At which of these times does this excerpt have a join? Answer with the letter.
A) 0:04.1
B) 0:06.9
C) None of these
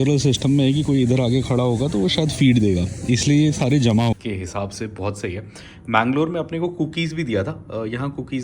A